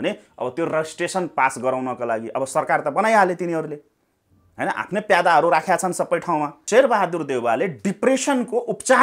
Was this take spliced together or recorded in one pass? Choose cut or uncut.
cut